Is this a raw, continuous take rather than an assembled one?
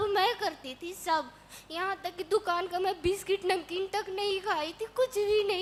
yes; 0 cuts

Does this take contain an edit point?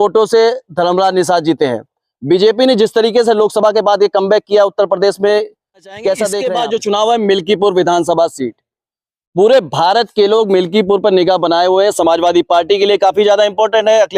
yes; 1 cut; at 6.4 s

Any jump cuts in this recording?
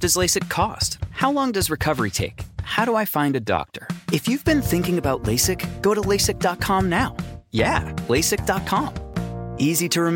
no; 0 cuts

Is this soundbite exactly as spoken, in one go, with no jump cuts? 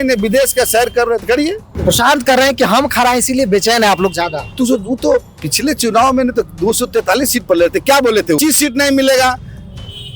no; 2 cuts; at 1.8 s, 8.4 s

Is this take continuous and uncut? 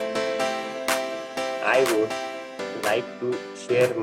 yes; 0 cuts

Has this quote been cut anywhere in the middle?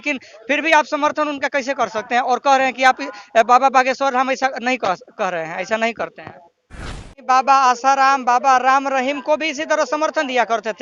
yes; 1 cut; at 6.8 s

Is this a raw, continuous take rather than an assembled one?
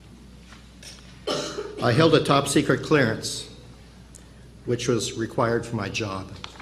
yes; 0 cuts

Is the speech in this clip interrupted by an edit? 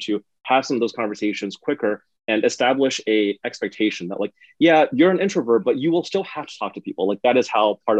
no; 0 cuts

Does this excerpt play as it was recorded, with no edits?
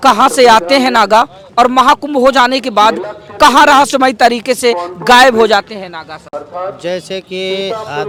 yes; 0 cuts

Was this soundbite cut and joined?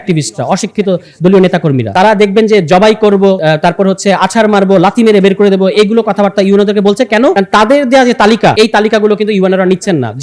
yes; 4 cuts; at 1.9 s, 3.4 s, 7.4 s, 8.5 s

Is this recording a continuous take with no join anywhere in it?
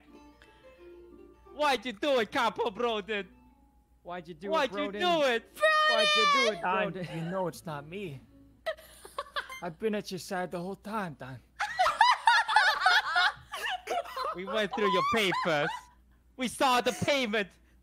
yes; 0 cuts

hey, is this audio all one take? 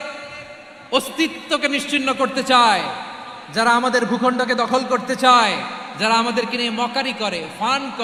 yes; 0 cuts

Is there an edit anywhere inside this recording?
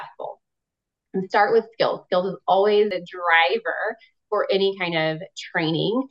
yes; 1 cut; at 2.9 s

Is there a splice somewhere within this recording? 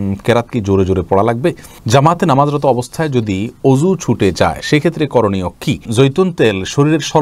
yes; 2 cuts; at 1.7 s, 5.9 s

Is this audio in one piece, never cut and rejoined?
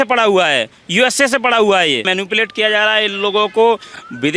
no; 1 cut; at 2.0 s

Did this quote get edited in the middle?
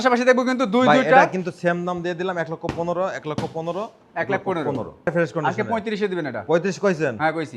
yes; 1 cut; at 5.1 s

